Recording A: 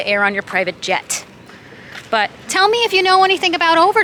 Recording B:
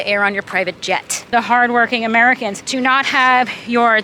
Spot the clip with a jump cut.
B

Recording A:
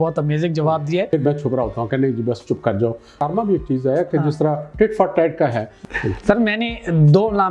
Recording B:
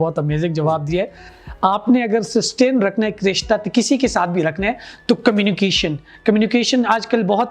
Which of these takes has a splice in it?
A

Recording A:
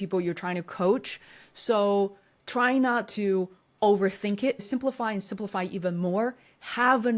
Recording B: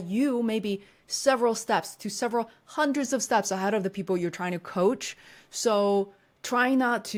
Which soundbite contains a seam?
A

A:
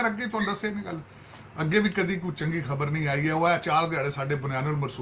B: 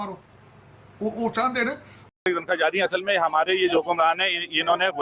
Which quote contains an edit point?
B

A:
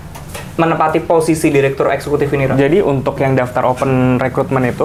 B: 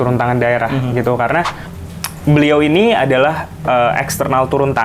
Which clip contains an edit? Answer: B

